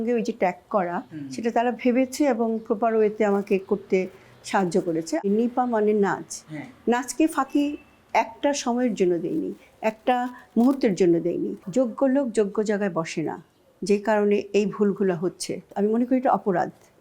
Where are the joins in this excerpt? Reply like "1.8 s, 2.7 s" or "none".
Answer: 5.2 s, 11.6 s, 15.6 s

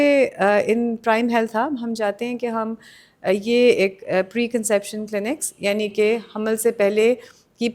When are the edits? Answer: none

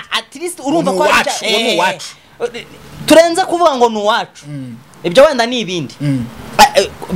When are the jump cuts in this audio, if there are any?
none

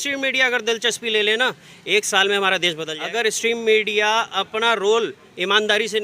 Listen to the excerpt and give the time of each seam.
2.9 s

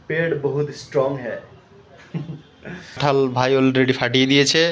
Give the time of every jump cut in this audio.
3.0 s

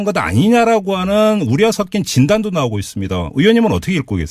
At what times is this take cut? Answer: none

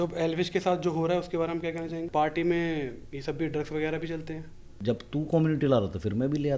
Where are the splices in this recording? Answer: 2.0 s, 4.8 s

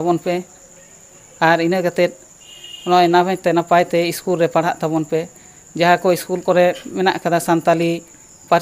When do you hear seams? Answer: none

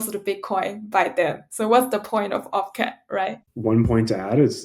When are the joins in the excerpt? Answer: 3.1 s

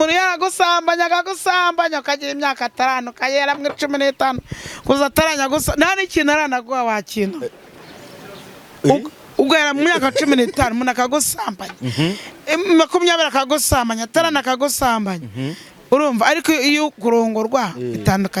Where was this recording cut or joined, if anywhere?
none

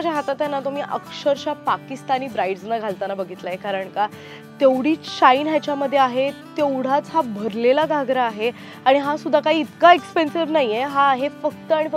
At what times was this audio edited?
none

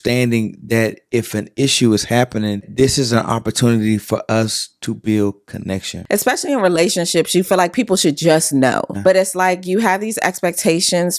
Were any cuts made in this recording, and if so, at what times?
2.7 s, 5.9 s, 8.9 s

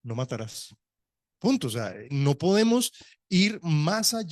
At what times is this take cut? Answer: none

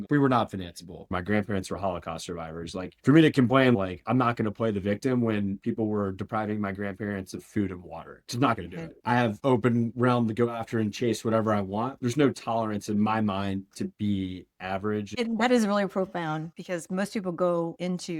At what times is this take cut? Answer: 1.1 s, 9.0 s, 15.1 s

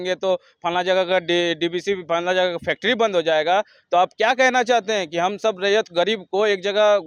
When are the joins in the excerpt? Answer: none

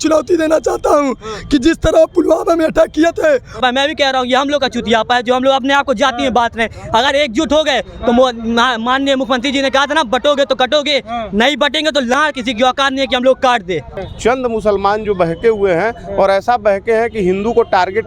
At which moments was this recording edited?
3.6 s, 14.0 s

